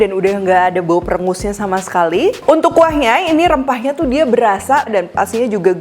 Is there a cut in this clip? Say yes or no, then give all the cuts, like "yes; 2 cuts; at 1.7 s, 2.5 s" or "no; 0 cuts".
yes; 1 cut; at 4.9 s